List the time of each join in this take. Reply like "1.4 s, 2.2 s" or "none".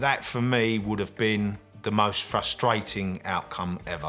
1.7 s